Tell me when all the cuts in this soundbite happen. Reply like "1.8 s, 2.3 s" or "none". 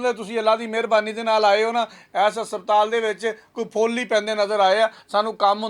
none